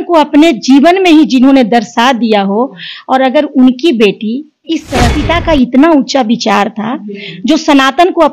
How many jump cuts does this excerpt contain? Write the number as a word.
one